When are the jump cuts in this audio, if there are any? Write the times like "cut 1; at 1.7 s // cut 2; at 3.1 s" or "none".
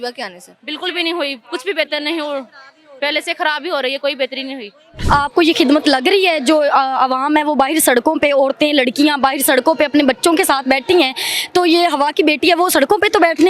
none